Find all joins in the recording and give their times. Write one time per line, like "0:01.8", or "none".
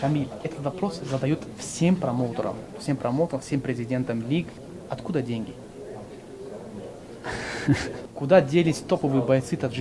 0:04.7
0:08.1